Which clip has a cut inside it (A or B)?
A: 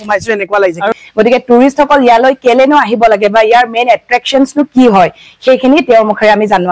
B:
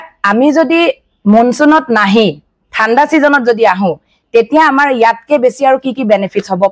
A